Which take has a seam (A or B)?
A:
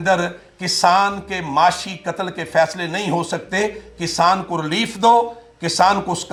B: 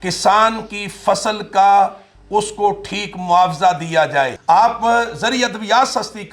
B